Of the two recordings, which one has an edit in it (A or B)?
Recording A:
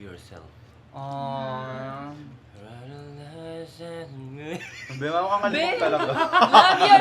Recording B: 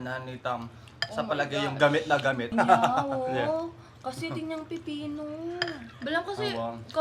B